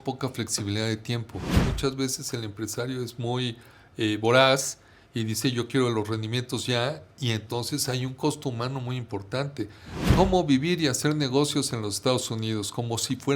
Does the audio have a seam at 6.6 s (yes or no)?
no